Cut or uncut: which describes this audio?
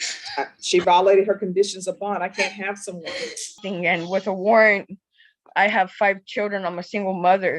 cut